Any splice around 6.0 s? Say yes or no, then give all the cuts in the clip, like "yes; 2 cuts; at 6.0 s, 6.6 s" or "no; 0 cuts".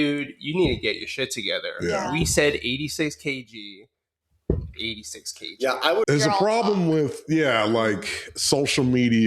yes; 1 cut; at 6.0 s